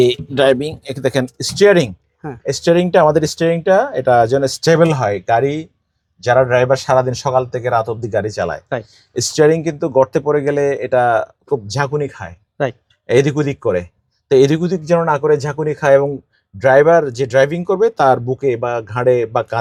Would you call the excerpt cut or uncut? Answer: uncut